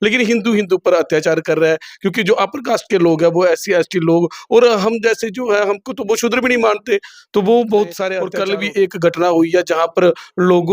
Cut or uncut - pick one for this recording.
cut